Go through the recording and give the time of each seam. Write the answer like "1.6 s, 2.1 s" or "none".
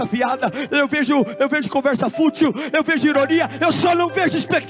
none